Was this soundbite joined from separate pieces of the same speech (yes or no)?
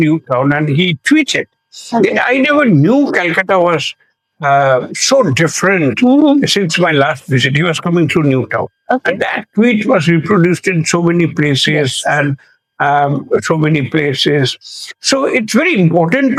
no